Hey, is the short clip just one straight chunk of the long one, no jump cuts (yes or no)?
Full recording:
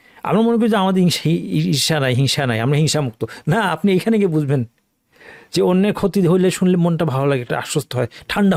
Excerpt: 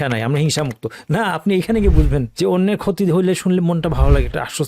no